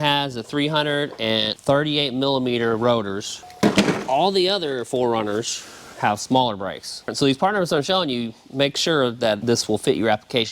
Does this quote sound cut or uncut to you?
cut